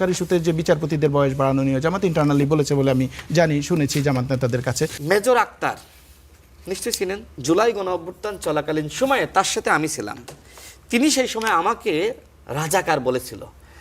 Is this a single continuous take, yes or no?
no